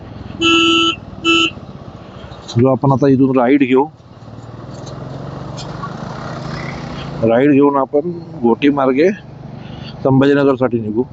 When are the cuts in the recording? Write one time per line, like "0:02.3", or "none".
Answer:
none